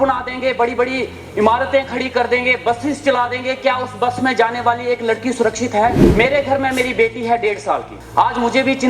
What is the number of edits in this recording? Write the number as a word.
two